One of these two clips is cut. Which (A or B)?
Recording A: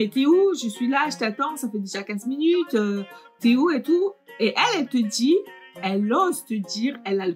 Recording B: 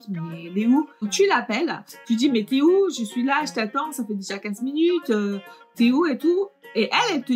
B